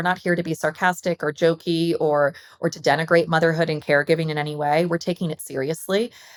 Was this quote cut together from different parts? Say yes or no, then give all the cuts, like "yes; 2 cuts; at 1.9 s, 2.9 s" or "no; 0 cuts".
no; 0 cuts